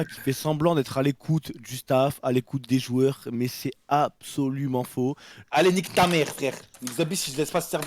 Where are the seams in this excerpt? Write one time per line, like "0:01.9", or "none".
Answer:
0:05.3